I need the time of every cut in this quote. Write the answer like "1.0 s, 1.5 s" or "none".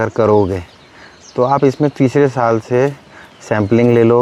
none